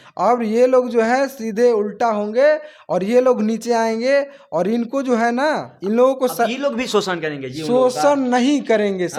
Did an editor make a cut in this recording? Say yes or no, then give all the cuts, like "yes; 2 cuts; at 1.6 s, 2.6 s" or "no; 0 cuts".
no; 0 cuts